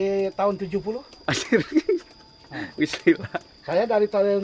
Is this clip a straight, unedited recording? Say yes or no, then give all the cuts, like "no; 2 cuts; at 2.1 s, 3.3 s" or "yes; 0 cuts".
yes; 0 cuts